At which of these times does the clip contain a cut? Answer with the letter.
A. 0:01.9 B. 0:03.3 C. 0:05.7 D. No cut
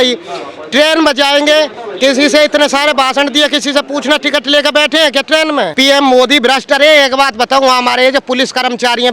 C